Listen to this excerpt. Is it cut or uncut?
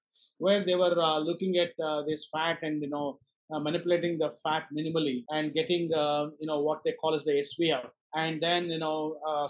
cut